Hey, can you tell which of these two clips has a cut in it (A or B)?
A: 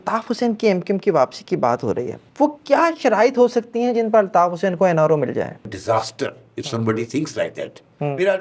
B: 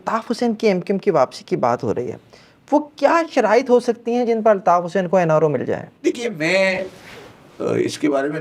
A